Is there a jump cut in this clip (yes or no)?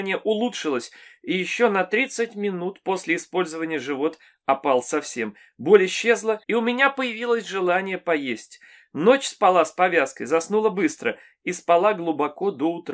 no